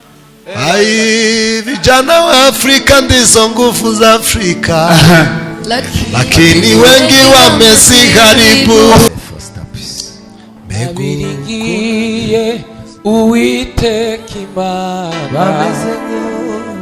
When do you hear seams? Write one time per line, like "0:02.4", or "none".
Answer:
0:09.1